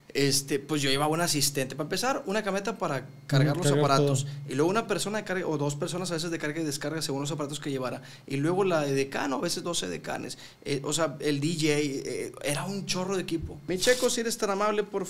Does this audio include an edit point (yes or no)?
yes